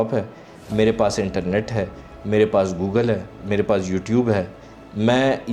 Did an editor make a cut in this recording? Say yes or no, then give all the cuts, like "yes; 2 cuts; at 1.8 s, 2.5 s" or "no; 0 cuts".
yes; 1 cut; at 3.4 s